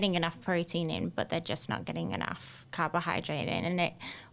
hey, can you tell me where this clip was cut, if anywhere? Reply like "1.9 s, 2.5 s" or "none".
none